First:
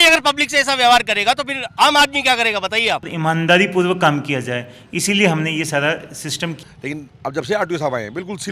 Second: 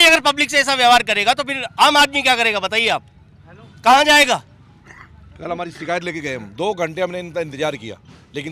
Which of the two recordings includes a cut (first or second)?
first